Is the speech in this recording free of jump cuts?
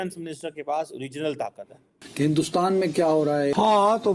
no; 1 cut; at 2.0 s

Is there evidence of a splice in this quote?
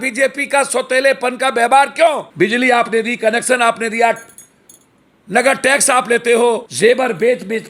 yes; 2 cuts; at 2.3 s, 6.7 s

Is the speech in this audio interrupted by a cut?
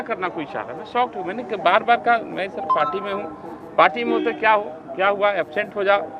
no; 0 cuts

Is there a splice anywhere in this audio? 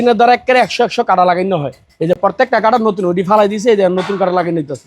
no; 0 cuts

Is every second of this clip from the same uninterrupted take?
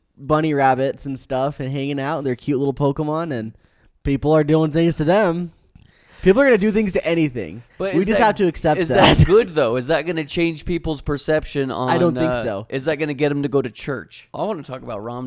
no; 1 cut; at 14.2 s

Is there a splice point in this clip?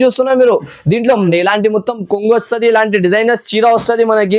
yes; 1 cut; at 1.3 s

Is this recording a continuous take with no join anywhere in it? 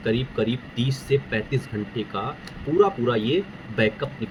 yes; 0 cuts

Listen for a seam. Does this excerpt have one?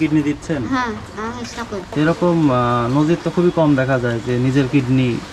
yes; 1 cut; at 1.9 s

